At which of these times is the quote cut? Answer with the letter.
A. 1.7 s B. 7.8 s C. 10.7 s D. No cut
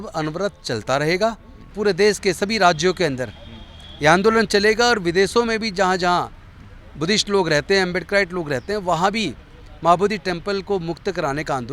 A